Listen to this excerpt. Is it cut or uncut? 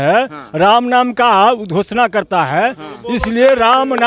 uncut